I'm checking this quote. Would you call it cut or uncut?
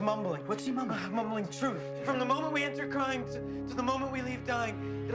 cut